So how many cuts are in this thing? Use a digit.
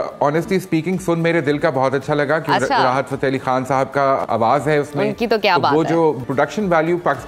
2